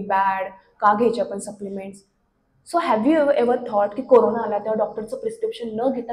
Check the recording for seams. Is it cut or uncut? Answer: uncut